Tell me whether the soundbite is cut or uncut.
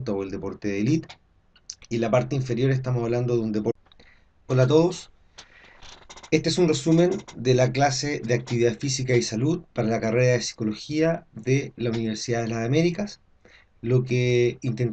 uncut